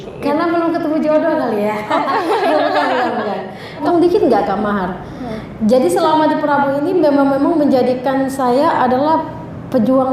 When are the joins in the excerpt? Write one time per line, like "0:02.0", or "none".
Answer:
0:03.8